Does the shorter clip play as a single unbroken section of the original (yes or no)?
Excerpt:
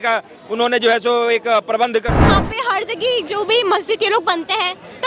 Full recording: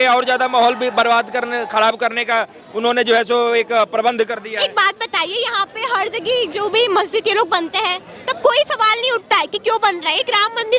no